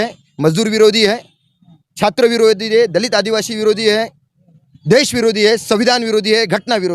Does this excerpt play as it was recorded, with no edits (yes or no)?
yes